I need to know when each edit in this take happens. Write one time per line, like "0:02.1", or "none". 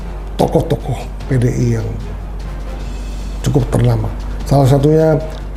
none